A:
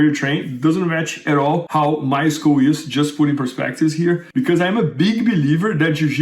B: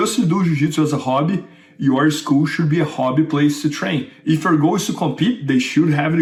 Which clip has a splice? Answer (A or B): A